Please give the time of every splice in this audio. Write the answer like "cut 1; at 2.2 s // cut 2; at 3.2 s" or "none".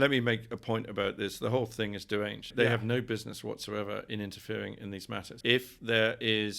cut 1; at 2.5 s // cut 2; at 5.3 s